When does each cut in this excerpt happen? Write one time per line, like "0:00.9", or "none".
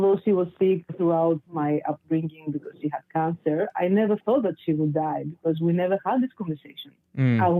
0:01.1